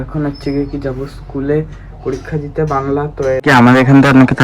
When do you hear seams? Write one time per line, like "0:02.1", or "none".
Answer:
0:03.4